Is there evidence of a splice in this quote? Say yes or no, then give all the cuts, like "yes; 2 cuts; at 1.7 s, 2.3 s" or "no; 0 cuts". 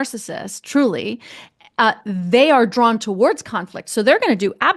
no; 0 cuts